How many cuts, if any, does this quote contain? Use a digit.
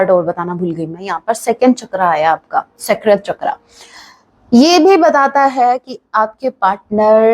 0